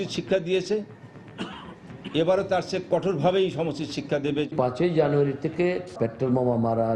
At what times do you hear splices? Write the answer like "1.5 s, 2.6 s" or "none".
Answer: 4.5 s, 5.8 s